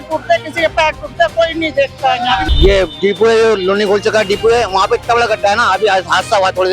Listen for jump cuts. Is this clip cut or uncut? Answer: cut